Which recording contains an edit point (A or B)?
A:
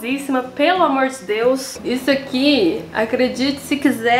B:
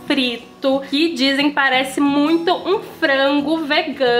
A